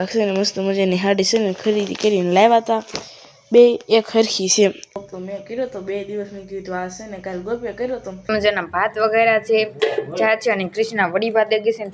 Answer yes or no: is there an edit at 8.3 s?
yes